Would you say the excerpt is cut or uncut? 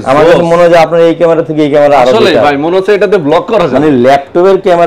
uncut